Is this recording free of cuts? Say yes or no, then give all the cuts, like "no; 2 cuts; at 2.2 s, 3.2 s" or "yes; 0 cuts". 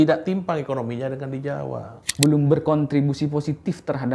no; 1 cut; at 2.0 s